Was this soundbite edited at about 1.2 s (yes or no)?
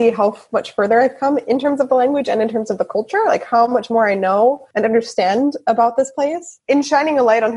no